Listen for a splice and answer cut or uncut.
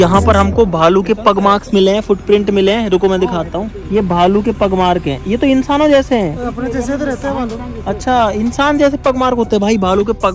uncut